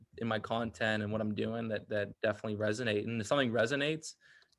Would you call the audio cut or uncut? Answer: uncut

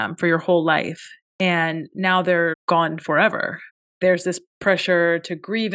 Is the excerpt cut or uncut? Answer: uncut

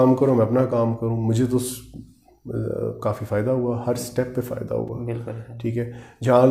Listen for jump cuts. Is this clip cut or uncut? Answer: uncut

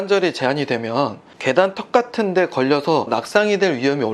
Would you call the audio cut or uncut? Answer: cut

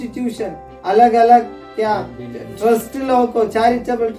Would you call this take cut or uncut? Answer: uncut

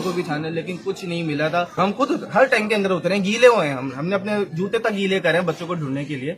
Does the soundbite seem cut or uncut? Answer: cut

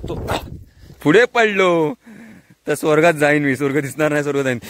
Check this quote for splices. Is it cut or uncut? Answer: cut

